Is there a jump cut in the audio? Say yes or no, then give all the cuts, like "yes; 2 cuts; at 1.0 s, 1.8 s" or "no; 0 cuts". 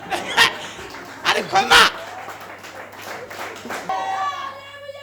yes; 1 cut; at 3.9 s